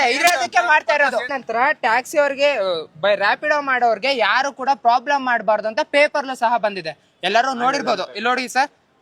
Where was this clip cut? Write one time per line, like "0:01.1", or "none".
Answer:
0:01.4